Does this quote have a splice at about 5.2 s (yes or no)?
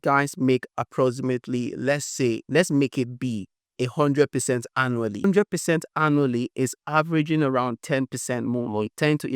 yes